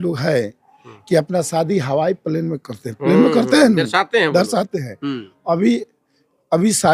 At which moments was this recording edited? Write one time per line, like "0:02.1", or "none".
none